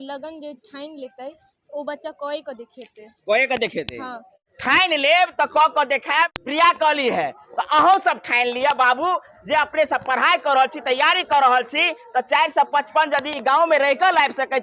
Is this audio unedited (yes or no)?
yes